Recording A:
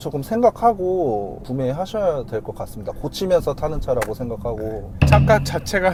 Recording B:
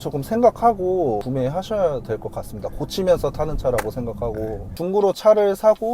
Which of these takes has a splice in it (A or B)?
B